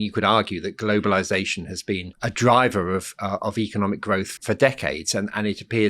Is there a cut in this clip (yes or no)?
yes